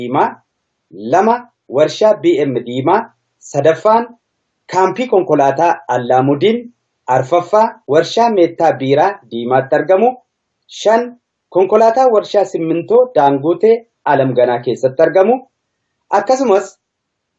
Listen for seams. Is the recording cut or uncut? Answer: cut